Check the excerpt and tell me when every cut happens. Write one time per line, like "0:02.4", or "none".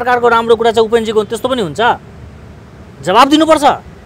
none